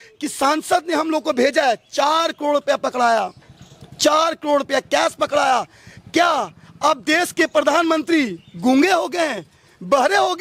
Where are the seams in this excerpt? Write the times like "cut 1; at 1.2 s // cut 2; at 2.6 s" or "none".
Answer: none